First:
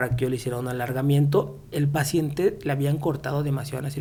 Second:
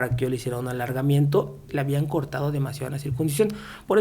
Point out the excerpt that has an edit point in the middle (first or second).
second